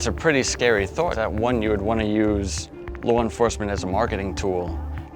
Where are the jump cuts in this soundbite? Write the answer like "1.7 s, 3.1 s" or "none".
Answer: 1.1 s